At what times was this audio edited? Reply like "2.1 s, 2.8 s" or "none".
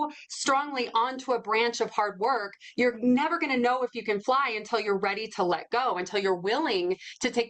none